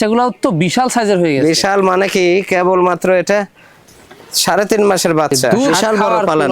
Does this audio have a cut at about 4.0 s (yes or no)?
no